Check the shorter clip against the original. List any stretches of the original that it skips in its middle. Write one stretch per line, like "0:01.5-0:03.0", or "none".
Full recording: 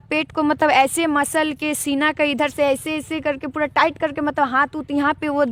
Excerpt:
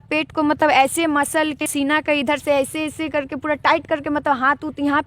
0:01.7-0:01.8